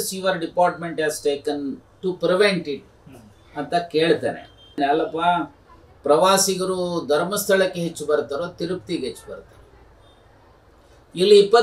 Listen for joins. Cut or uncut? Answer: cut